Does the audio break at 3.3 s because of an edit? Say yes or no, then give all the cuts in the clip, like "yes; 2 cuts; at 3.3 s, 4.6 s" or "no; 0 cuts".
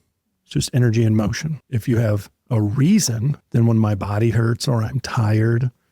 yes; 2 cuts; at 1.7 s, 3.3 s